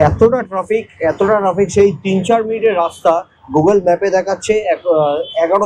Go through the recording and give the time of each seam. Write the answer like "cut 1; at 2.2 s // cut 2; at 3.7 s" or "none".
none

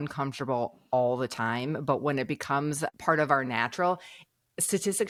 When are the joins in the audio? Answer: none

